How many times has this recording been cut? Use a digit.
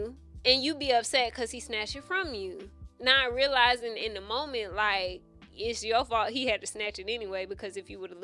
0